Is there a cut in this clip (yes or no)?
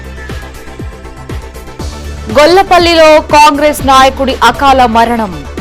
no